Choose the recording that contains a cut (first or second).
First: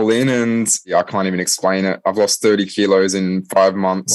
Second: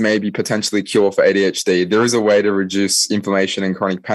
first